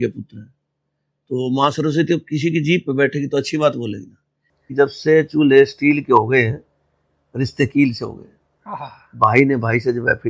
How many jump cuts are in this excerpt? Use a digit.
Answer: 1